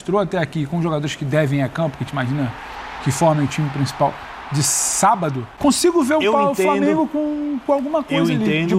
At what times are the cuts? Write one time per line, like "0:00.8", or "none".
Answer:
0:05.4